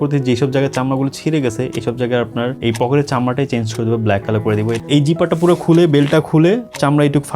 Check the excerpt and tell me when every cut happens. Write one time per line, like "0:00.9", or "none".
0:02.6
0:04.8